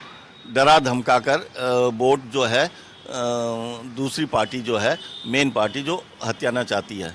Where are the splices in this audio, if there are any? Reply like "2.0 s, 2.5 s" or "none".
none